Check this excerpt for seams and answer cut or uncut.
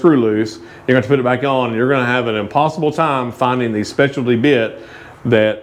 uncut